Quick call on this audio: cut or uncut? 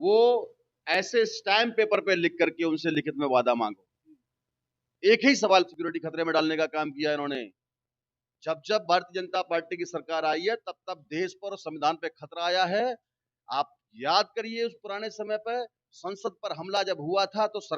cut